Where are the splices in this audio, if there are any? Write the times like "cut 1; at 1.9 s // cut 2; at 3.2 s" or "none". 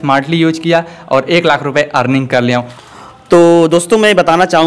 none